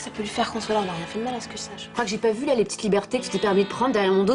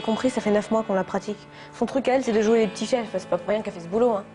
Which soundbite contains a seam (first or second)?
first